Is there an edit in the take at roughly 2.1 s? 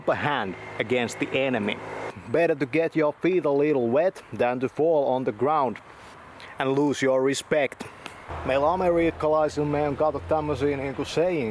yes; 2 cuts; at 2.1 s, 8.2 s

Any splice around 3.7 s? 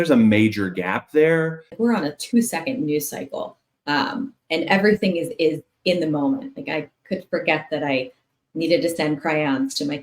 no; 1 cut; at 1.7 s

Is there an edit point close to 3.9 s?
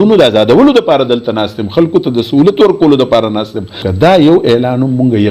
yes; 1 cut; at 3.9 s

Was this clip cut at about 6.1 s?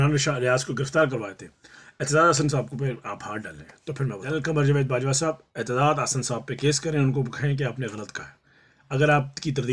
no; 1 cut; at 4.3 s

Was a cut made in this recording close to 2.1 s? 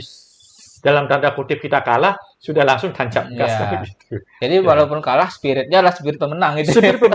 no; 0 cuts

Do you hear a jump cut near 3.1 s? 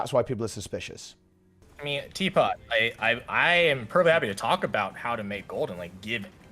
no; 1 cut; at 1.7 s

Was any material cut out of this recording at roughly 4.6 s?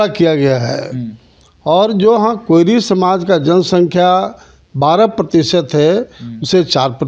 no; 0 cuts

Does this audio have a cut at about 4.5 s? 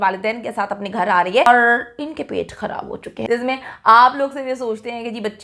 no; 2 cuts; at 1.5 s, 3.1 s

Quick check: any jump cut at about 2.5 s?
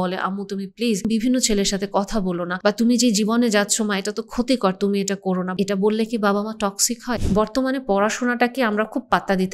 yes; 4 cuts; at 1.1 s, 2.5 s, 5.5 s, 7.1 s

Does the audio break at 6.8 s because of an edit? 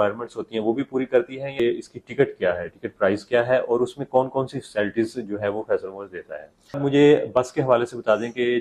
yes; 2 cuts; at 1.6 s, 6.8 s

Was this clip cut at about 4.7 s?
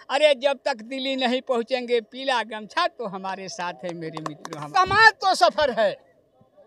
yes; 1 cut; at 4.7 s

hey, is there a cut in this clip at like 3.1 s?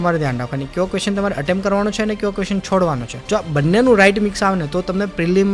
yes; 1 cut; at 3.1 s

